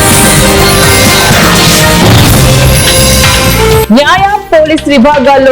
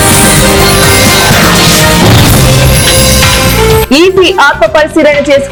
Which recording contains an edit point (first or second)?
first